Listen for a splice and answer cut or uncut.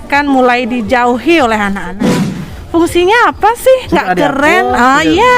cut